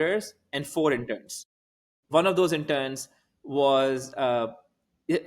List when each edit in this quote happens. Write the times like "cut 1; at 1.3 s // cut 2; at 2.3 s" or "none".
cut 1; at 2.0 s